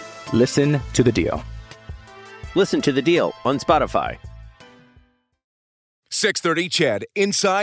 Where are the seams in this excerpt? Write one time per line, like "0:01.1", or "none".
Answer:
0:06.0